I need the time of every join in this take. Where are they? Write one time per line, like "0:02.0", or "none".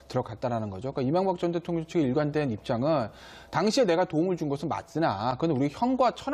0:03.5